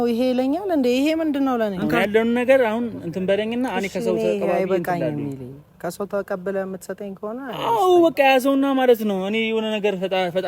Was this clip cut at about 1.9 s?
yes; 1 cut; at 1.9 s

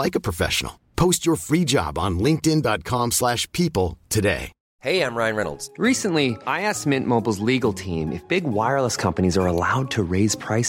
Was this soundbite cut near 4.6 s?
yes; 1 cut; at 4.6 s

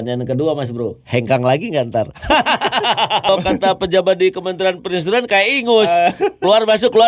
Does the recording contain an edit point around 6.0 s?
no; 1 cut; at 3.3 s

